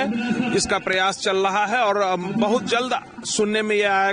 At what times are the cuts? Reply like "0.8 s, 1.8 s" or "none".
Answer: none